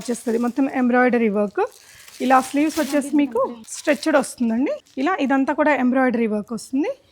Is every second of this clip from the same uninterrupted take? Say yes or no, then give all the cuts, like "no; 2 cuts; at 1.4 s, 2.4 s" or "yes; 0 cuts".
no; 2 cuts; at 3.7 s, 4.8 s